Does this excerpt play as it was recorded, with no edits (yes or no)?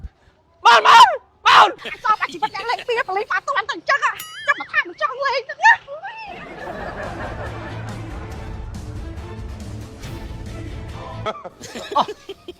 no